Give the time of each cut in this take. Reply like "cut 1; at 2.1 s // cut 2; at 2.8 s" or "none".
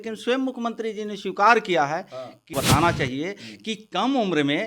cut 1; at 2.5 s